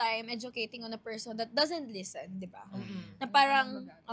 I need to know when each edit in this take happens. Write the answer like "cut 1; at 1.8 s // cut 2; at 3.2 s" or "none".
none